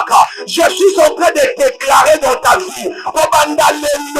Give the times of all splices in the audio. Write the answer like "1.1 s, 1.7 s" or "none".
none